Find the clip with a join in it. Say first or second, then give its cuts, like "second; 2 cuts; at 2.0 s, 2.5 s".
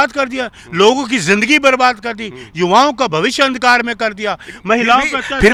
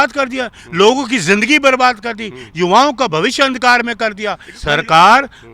second; 1 cut; at 4.5 s